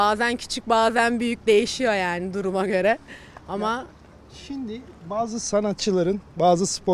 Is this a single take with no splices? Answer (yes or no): yes